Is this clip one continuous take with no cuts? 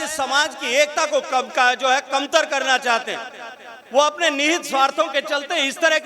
yes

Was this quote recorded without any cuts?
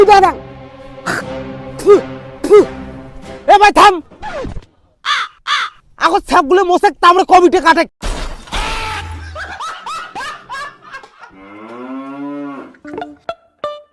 yes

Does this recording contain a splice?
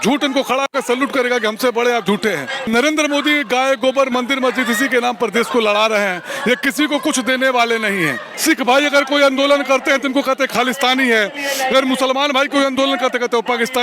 yes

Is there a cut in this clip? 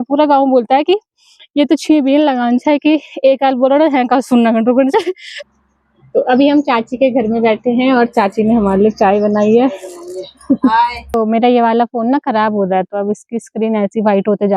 yes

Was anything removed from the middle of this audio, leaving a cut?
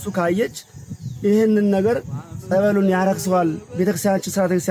no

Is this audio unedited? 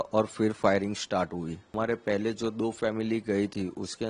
no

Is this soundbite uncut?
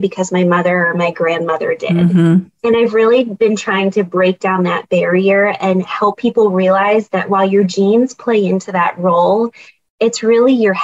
yes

